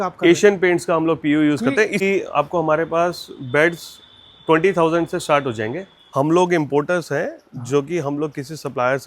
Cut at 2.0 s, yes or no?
yes